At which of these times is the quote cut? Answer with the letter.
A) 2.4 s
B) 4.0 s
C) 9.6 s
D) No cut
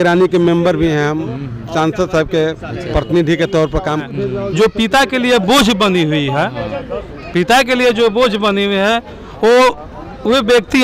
B